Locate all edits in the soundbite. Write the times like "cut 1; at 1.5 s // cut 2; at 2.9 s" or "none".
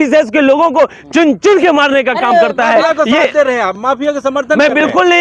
none